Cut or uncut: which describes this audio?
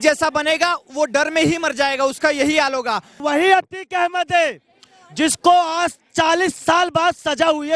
cut